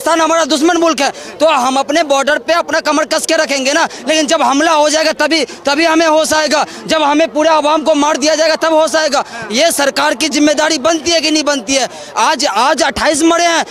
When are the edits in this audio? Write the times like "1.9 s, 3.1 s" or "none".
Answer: none